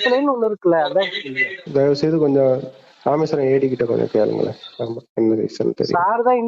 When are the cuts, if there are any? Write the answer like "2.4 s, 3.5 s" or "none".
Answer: 1.6 s